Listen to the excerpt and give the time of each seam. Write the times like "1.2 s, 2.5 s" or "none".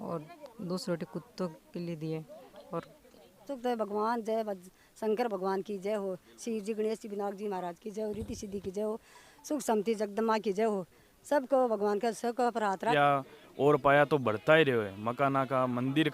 3.5 s, 12.9 s